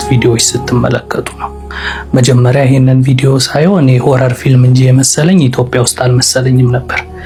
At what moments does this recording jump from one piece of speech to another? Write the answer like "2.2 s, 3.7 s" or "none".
none